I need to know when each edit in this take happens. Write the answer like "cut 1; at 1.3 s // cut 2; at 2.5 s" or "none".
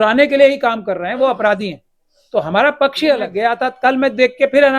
cut 1; at 3.3 s